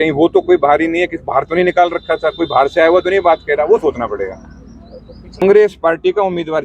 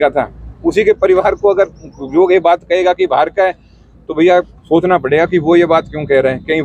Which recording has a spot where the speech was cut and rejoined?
first; 1 cut; at 5.4 s

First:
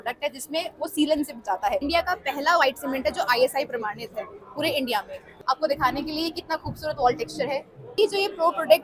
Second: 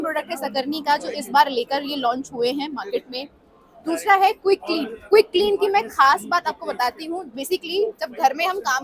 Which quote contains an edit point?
first; 3 cuts; at 1.8 s, 5.2 s, 8.0 s

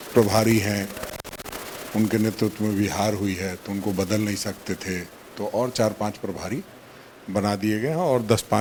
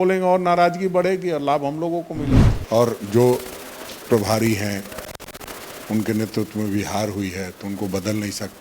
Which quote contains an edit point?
second; 1 cut; at 2.5 s

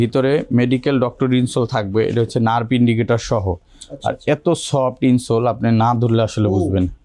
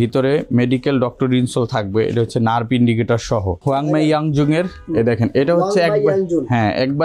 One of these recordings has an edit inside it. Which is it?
second; 1 cut; at 3.6 s

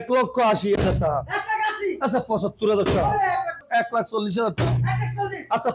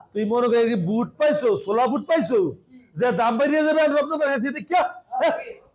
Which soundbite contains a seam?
first; 1 cut; at 3.6 s

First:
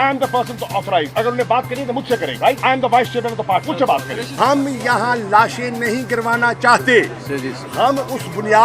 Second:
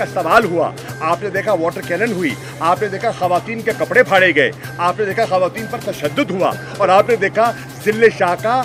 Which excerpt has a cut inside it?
first; 3 cuts; at 1.1 s, 2.4 s, 4.0 s

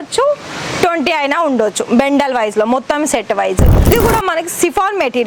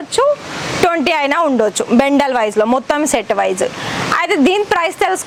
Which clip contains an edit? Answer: first; 1 cut; at 3.9 s

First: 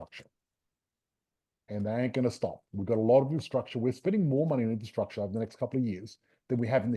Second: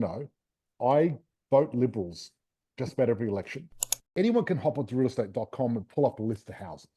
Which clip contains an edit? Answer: second; 1 cut; at 4.1 s

